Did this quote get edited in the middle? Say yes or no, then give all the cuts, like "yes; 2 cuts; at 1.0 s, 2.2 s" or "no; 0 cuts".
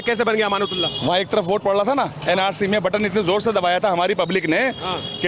no; 0 cuts